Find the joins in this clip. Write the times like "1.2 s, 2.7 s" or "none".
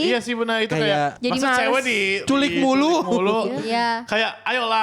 1.2 s, 2.2 s